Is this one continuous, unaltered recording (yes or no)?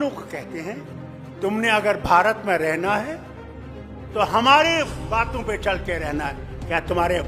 yes